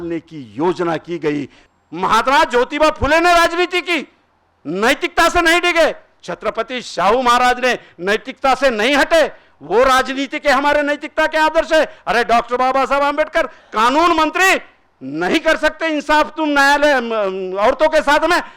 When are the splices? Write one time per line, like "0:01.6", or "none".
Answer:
0:01.6